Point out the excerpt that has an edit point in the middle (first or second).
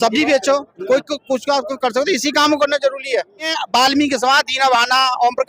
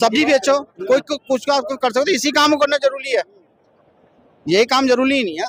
first